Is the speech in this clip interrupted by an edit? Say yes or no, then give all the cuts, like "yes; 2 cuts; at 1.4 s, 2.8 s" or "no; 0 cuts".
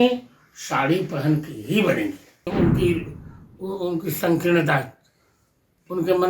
yes; 1 cut; at 2.5 s